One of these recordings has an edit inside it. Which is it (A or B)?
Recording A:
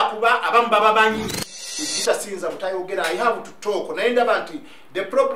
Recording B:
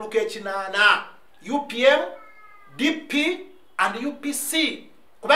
A